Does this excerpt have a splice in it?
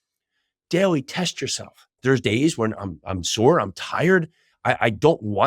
yes; 1 cut; at 1.9 s

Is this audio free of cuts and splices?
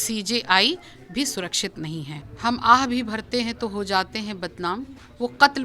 no; 1 cut; at 2.2 s

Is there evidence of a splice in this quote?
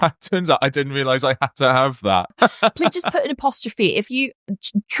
yes; 1 cut; at 2.3 s

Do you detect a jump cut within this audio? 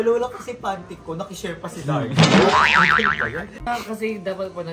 yes; 1 cut; at 3.6 s

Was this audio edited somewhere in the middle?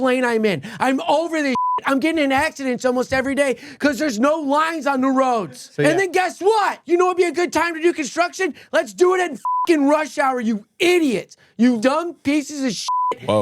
yes; 3 cuts; at 5.6 s, 6.8 s, 11.8 s

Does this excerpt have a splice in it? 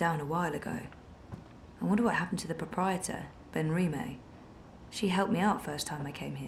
no; 0 cuts

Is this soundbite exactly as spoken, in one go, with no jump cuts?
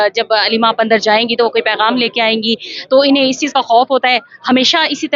yes; 0 cuts

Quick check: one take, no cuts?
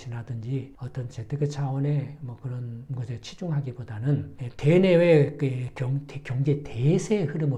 yes; 0 cuts

